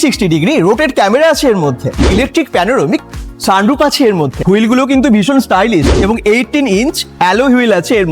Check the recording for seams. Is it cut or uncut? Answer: uncut